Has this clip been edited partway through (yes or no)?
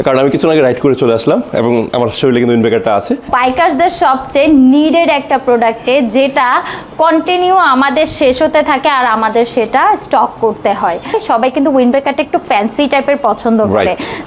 yes